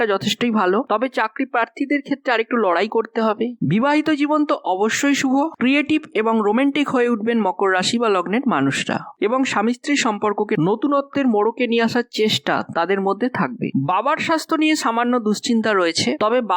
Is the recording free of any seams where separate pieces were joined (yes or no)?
no